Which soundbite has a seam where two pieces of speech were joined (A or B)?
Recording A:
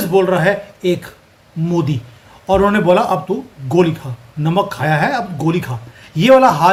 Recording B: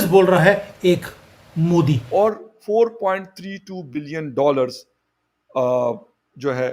B